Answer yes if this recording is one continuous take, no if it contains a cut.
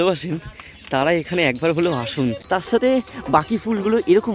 no